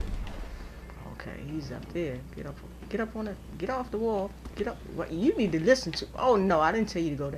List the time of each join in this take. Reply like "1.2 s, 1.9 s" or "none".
0.9 s